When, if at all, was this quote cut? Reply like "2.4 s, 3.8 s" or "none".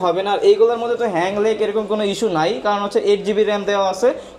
none

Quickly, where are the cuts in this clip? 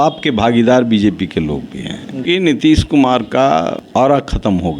2.2 s, 3.8 s

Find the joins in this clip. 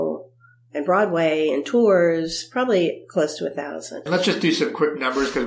4.0 s

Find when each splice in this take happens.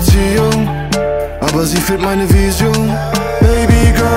none

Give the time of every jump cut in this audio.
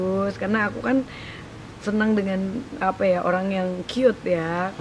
none

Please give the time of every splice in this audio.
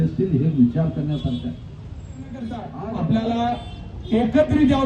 2.4 s

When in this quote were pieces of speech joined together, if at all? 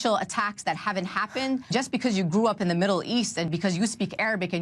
1.7 s, 3.5 s

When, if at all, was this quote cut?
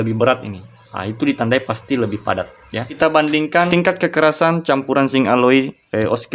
2.9 s, 3.7 s

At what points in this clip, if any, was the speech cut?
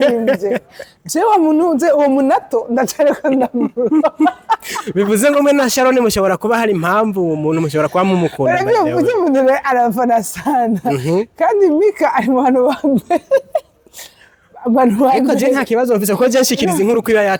none

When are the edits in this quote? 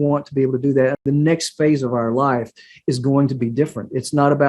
1.0 s

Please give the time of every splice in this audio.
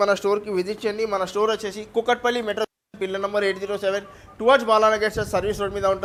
none

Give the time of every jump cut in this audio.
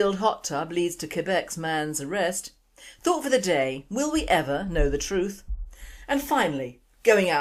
2.8 s

